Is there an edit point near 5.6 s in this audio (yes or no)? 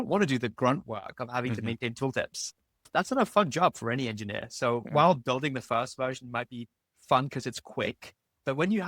no